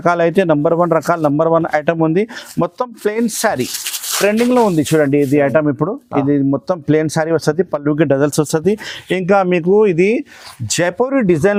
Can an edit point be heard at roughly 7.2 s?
no; 0 cuts

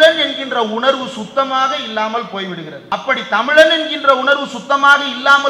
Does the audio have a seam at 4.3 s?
no; 1 cut; at 2.8 s

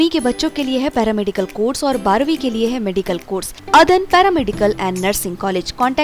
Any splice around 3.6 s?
yes; 1 cut; at 3.6 s

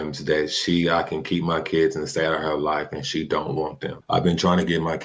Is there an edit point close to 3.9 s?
yes; 1 cut; at 3.9 s

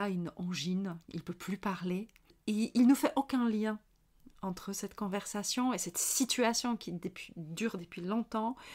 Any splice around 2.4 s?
yes; 1 cut; at 2.4 s

